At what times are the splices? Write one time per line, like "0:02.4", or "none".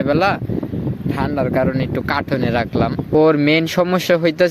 0:03.1